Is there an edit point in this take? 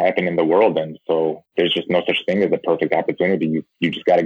no; 0 cuts

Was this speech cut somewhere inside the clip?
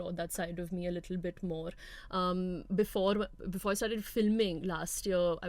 no; 0 cuts

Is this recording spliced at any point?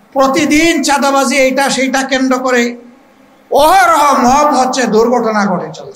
no; 0 cuts

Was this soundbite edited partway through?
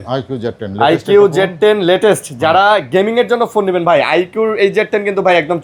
no; 0 cuts

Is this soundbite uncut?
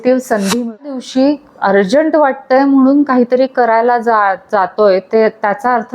no; 1 cut; at 1.0 s

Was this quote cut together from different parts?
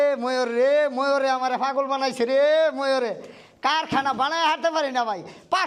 no; 0 cuts

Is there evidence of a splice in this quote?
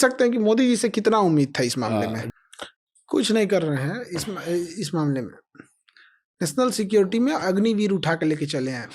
yes; 1 cut; at 2.2 s

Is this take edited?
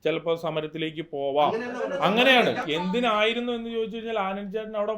yes; 1 cut; at 2.6 s

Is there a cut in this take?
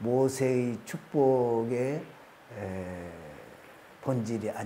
no; 0 cuts

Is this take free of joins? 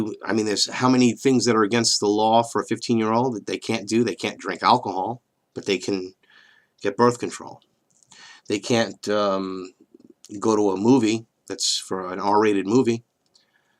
no; 1 cut; at 1.6 s

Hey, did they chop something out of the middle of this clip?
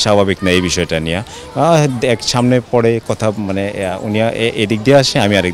no; 0 cuts

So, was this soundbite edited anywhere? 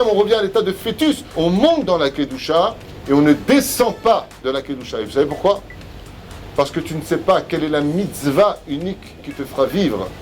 yes; 1 cut; at 1.3 s

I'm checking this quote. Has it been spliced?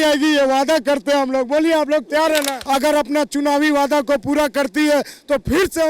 yes; 1 cut; at 2.5 s

